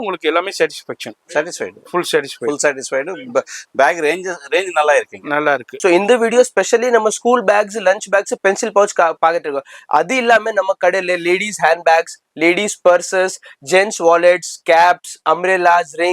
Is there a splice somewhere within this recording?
yes; 1 cut; at 5.7 s

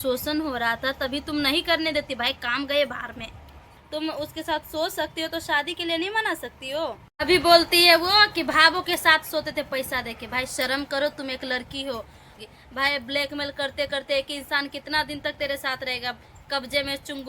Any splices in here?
yes; 3 cuts; at 3.7 s, 7.0 s, 12.3 s

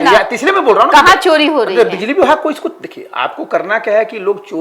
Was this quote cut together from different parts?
no; 0 cuts

